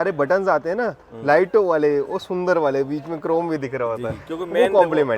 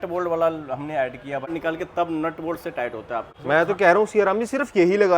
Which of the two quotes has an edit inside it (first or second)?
second